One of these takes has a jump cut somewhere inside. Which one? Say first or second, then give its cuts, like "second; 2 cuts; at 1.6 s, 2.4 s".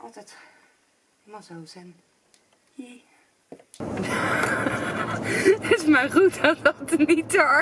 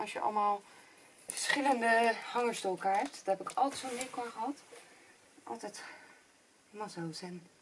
first; 1 cut; at 3.8 s